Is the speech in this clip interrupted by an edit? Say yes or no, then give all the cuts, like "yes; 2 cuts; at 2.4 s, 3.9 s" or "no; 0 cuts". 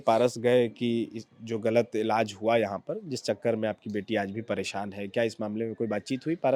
no; 0 cuts